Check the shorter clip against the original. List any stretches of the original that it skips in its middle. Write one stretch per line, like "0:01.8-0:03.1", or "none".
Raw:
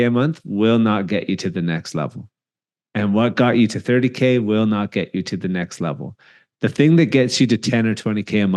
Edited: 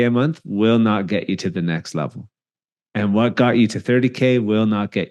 none